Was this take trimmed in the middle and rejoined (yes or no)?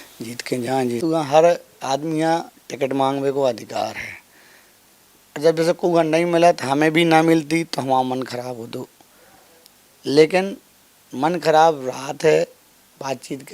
yes